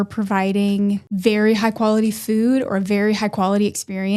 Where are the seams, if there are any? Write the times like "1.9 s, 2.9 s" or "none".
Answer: 1.1 s